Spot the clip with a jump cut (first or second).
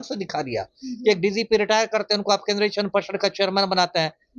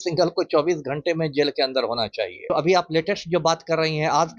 second